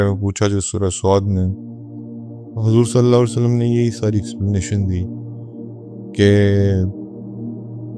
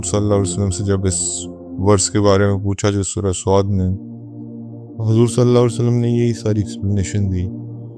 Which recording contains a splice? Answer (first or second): first